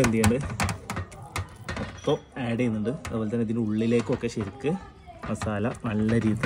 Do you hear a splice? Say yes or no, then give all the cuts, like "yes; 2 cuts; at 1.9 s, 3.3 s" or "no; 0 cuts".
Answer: no; 0 cuts